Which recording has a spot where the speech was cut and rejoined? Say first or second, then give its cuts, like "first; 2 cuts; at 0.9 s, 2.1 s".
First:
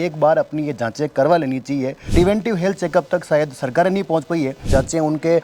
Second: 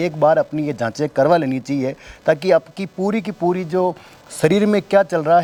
first; 2 cuts; at 2.1 s, 4.6 s